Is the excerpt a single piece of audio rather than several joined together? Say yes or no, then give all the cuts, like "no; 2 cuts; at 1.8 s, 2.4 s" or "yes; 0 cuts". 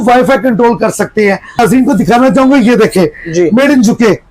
no; 1 cut; at 1.6 s